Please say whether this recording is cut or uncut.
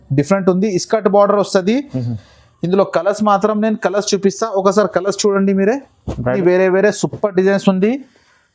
cut